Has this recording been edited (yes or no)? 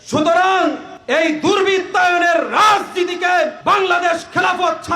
yes